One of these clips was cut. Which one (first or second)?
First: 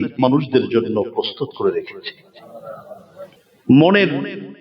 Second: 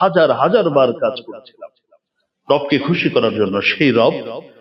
first